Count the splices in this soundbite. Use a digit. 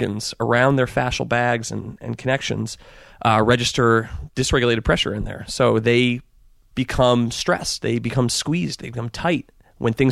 1